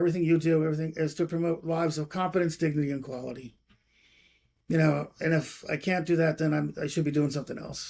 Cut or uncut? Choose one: uncut